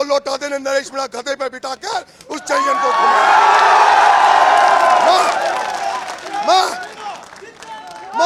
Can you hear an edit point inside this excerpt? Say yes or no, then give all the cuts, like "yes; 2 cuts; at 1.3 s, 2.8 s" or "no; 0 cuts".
no; 0 cuts